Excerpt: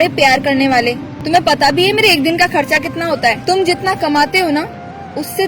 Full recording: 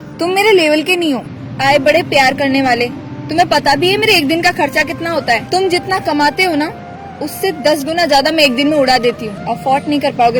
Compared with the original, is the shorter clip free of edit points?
no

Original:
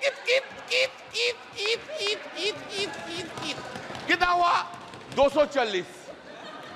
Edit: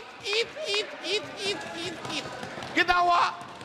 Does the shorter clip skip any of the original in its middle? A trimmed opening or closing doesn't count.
no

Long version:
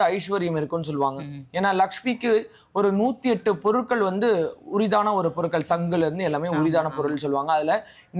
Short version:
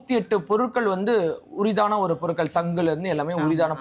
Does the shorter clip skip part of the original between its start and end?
no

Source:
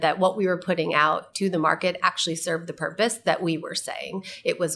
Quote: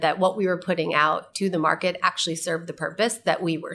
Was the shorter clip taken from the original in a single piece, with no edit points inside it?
yes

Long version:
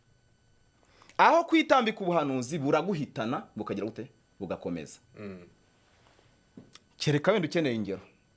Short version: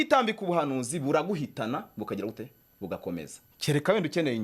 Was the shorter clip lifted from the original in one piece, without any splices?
no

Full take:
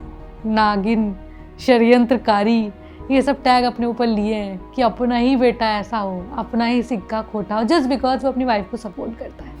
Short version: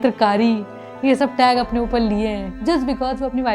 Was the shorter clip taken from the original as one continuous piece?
no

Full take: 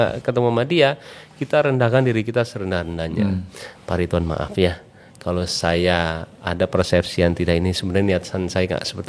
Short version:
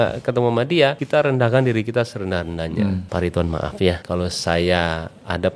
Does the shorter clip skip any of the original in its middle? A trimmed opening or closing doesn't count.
yes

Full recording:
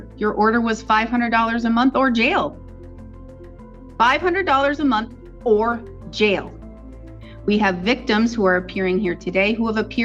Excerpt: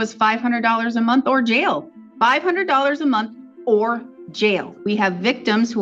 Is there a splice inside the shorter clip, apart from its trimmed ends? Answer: yes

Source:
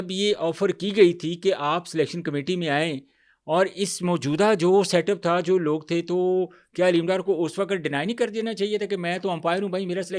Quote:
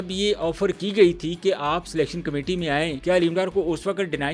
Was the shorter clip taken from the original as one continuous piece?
no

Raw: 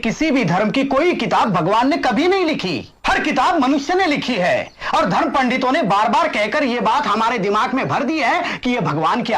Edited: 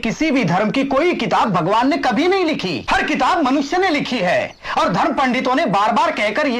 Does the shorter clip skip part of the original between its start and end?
yes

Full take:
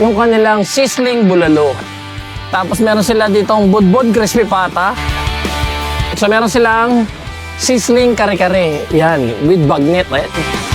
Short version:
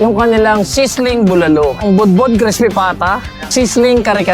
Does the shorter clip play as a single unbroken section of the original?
no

